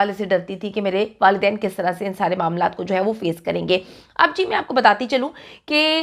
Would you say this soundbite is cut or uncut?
uncut